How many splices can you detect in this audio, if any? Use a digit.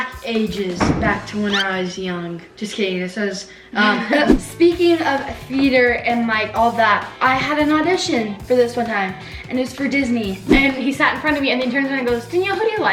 2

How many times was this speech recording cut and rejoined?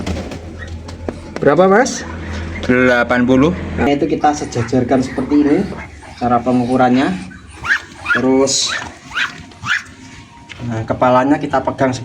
1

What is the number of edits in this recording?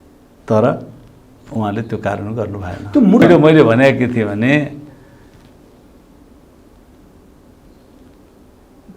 1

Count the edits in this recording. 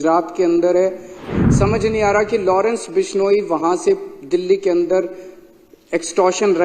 1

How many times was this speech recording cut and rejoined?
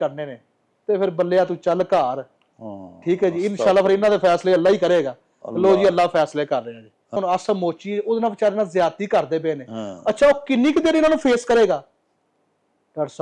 1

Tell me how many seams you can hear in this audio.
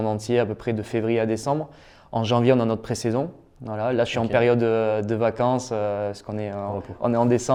0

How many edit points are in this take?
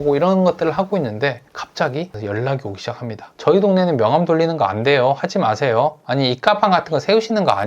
1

